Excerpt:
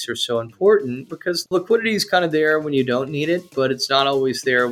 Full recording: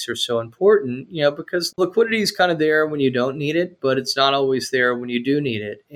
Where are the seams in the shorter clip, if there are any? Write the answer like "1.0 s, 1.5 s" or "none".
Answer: 1.1 s